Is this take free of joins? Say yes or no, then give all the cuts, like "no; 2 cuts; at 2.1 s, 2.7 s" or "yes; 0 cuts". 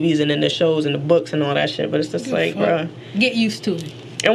yes; 0 cuts